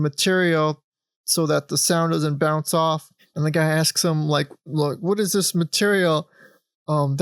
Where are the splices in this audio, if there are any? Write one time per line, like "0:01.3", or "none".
0:03.2

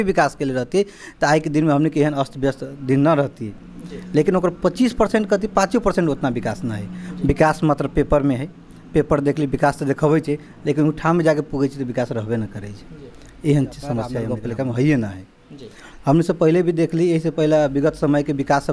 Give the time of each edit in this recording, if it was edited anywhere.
0:14.3

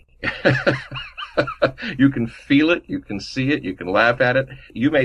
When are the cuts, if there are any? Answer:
none

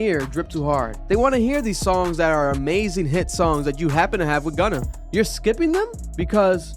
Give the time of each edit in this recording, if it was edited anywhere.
none

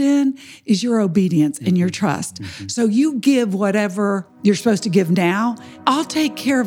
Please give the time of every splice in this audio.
0:04.3
0:05.7

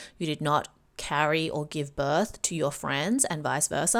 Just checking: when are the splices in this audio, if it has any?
none

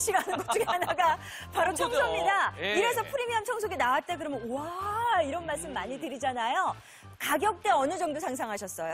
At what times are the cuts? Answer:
0:03.1
0:04.8

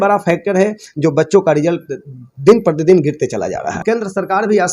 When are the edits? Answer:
0:03.8

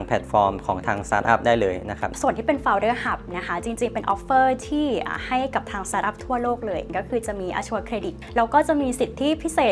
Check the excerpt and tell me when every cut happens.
0:02.1
0:06.9
0:08.2

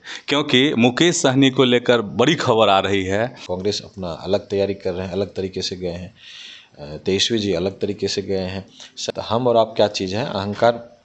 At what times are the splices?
0:03.4
0:08.9

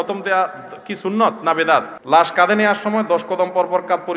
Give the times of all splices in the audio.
0:01.9

